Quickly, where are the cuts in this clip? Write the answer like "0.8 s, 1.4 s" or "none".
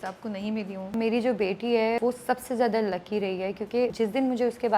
0.9 s, 2.0 s, 3.9 s